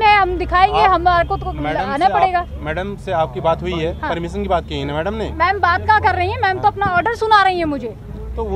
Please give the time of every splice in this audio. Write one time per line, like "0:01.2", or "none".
none